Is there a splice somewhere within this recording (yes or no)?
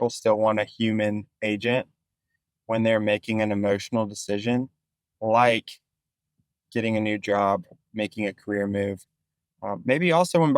no